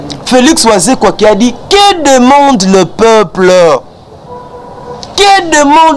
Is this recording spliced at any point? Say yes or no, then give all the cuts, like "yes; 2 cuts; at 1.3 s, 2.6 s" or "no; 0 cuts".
no; 0 cuts